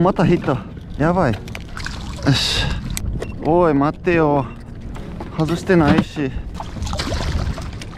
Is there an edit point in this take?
yes; 3 cuts; at 1.8 s, 3.0 s, 6.5 s

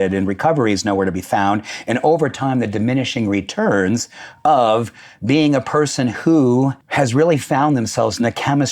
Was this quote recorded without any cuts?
no; 1 cut; at 6.8 s

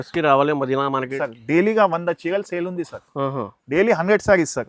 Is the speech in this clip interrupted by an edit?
yes; 1 cut; at 1.2 s

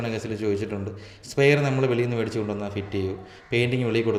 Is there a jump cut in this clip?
no; 0 cuts

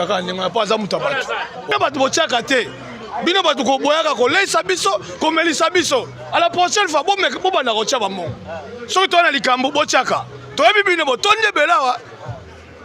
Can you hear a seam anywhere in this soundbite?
yes; 1 cut; at 1.7 s

